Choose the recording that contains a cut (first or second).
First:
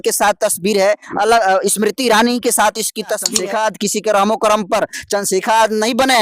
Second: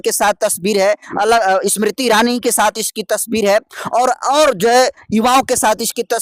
first